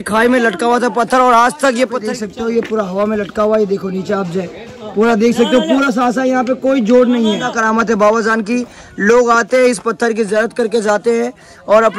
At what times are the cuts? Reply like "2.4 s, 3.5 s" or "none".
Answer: 2.0 s, 7.5 s